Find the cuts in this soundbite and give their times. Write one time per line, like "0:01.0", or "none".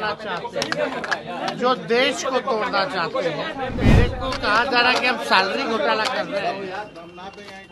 0:03.9